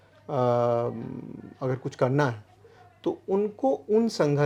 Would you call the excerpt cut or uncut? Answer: uncut